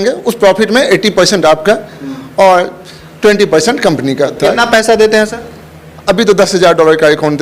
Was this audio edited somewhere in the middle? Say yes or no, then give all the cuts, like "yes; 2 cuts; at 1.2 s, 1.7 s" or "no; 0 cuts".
yes; 1 cut; at 4.4 s